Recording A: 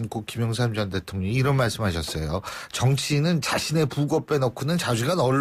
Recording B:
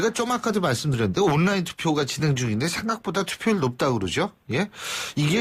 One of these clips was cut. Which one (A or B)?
B